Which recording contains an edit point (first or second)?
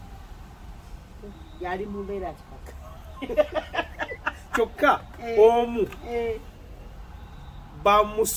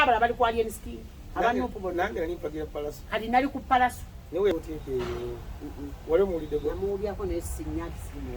second